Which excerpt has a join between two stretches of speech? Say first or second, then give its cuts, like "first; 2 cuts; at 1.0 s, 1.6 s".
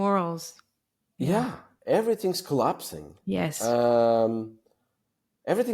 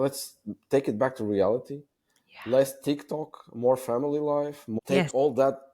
second; 1 cut; at 4.8 s